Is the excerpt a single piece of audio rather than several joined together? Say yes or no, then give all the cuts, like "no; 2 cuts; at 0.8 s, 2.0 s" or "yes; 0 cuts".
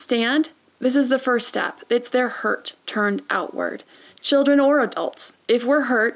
yes; 0 cuts